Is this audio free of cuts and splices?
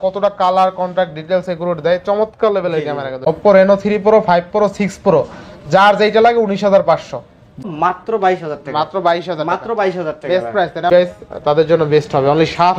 no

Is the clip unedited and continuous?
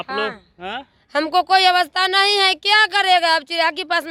yes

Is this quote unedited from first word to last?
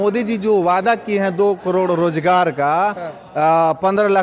yes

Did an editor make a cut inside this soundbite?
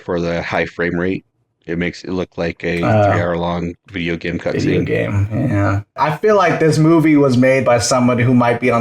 yes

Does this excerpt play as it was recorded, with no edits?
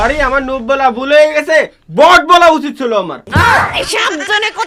yes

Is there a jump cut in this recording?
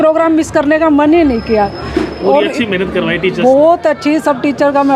no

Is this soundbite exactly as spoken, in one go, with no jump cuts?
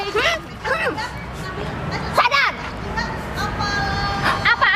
yes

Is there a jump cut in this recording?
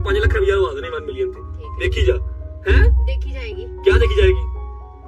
no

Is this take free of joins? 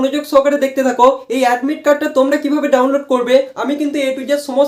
yes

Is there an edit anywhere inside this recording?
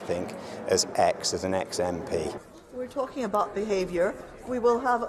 yes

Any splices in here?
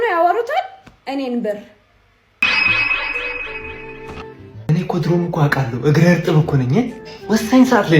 yes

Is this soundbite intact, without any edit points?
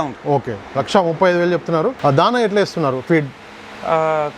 no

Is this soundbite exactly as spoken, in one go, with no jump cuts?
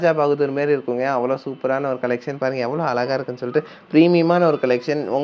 yes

